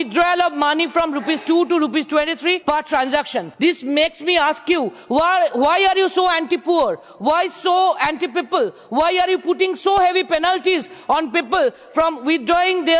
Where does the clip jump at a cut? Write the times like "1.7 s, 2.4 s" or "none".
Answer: 2.6 s, 3.5 s